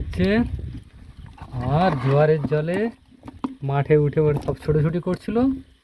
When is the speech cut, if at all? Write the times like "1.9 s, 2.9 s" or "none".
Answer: none